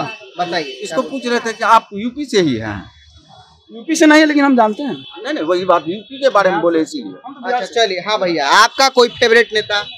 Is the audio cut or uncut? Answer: uncut